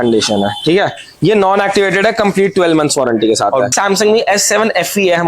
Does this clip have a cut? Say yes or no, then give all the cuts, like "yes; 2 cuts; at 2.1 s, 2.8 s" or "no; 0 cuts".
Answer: yes; 1 cut; at 3.7 s